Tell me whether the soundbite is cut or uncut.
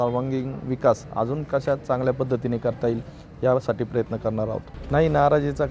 cut